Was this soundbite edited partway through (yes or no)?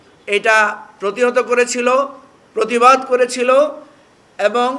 no